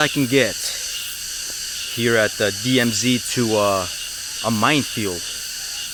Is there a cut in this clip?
no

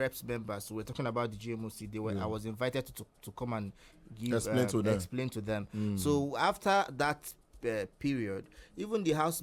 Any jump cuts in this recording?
no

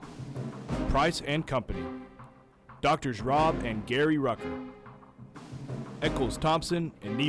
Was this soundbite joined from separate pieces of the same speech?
no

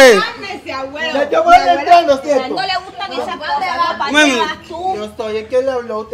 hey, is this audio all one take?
yes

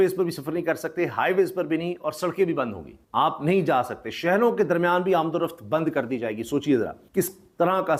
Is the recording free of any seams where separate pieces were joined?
yes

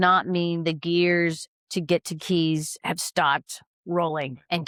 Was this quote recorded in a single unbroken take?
yes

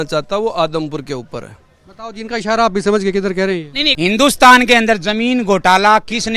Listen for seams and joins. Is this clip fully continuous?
no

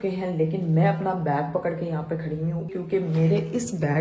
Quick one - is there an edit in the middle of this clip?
yes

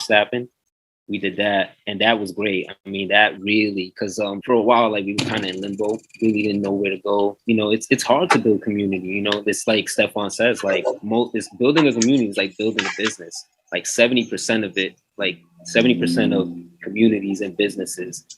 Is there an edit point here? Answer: yes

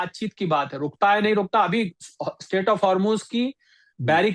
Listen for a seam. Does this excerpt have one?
no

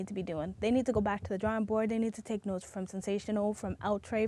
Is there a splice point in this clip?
no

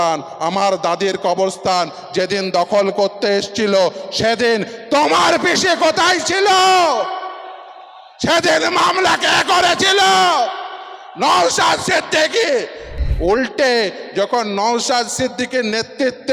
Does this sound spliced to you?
yes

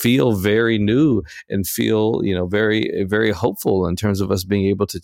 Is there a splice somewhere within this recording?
no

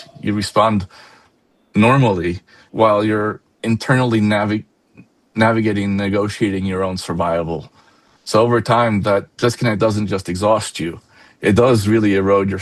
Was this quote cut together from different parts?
no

